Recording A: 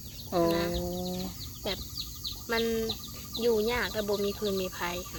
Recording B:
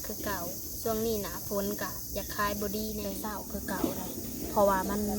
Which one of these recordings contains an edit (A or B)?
B